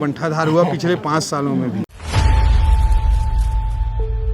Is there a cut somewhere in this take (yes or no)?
yes